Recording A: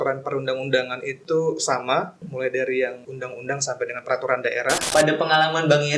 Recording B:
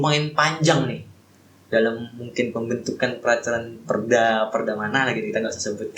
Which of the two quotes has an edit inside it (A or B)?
A